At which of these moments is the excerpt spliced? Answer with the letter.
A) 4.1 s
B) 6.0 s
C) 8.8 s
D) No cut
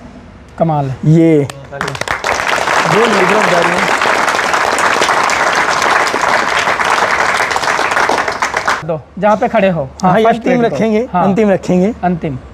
C